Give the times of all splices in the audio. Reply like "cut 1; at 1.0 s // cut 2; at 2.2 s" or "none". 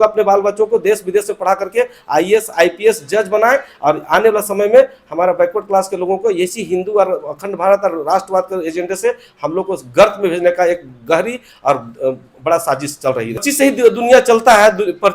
cut 1; at 13.5 s